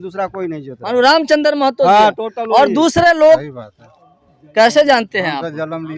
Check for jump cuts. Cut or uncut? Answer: cut